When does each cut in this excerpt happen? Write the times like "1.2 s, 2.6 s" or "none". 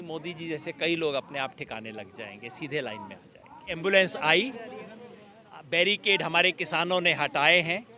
3.7 s

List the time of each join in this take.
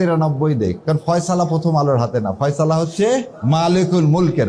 0.8 s, 3.3 s

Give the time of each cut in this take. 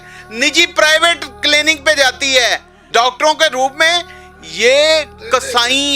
2.8 s

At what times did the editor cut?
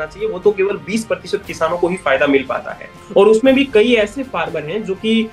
2.9 s

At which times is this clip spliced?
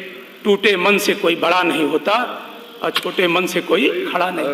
none

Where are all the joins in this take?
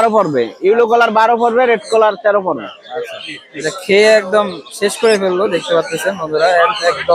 none

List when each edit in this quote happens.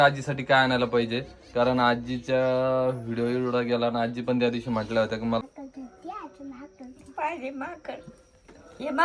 5.4 s

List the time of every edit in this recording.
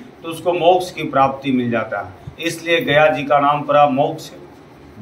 none

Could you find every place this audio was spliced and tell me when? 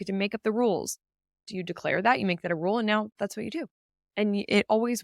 1.4 s

